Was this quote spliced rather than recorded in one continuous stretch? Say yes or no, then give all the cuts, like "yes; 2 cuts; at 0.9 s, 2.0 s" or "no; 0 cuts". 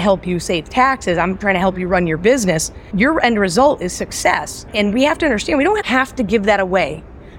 yes; 2 cuts; at 2.9 s, 4.5 s